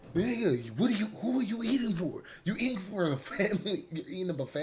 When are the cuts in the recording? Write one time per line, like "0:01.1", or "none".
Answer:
none